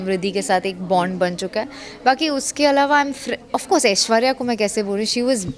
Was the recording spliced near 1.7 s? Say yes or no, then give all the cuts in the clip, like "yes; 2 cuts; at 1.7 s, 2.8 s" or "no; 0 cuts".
no; 0 cuts